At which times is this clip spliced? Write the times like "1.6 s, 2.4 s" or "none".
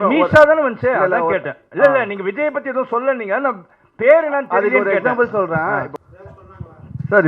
5.9 s